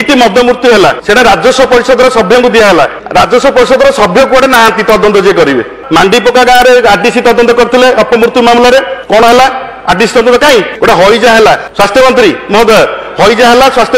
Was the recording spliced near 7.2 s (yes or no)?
no